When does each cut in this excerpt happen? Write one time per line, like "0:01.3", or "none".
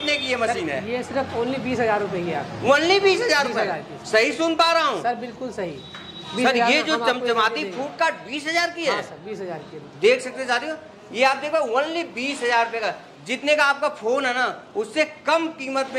none